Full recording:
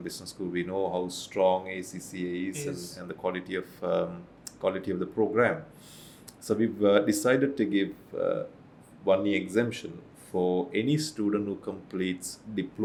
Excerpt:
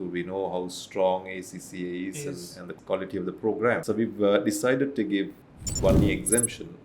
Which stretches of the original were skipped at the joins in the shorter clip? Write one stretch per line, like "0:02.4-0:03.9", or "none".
0:03.0-0:04.4
0:05.6-0:06.4
0:08.0-0:08.7